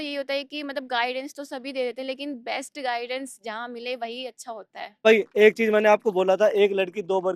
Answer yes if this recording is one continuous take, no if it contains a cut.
no